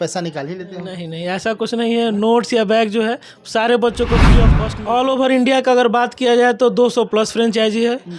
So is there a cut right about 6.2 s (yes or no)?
no